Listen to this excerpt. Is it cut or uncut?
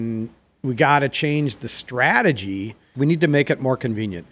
cut